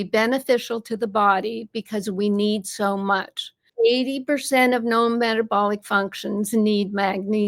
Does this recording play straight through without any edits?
no; 1 cut; at 3.6 s

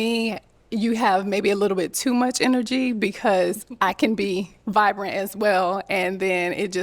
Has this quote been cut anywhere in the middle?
no; 0 cuts

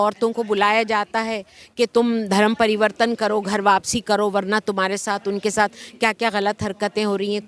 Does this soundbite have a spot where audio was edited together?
no; 0 cuts

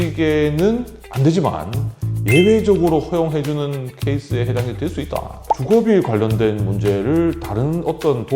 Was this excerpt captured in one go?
no; 2 cuts; at 1.0 s, 5.3 s

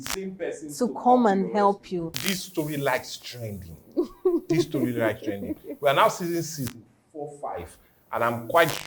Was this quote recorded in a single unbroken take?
no; 1 cut; at 2.2 s

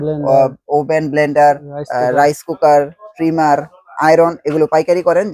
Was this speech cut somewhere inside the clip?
no; 0 cuts

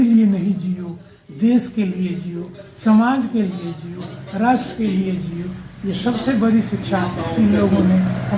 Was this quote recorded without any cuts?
yes; 0 cuts

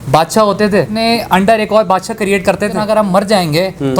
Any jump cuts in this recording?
yes; 2 cuts; at 0.8 s, 2.8 s

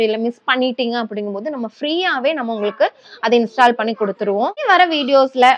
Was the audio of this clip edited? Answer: yes; 1 cut; at 4.6 s

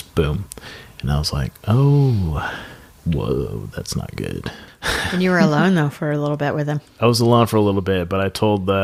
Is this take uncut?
yes; 0 cuts

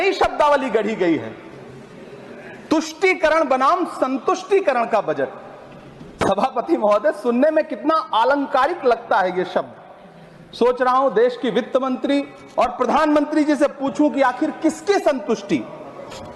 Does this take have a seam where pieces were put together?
no; 0 cuts

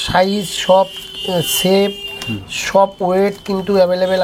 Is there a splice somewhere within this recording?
no; 0 cuts

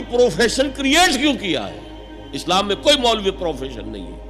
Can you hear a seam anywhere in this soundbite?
no; 0 cuts

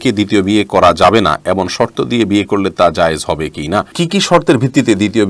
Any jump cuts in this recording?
yes; 1 cut; at 4.0 s

